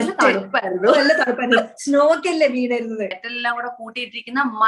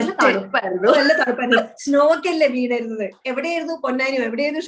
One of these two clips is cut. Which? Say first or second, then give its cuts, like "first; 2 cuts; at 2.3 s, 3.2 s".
first; 1 cut; at 3.2 s